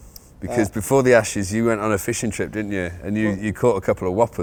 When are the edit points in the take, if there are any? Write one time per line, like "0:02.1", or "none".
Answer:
none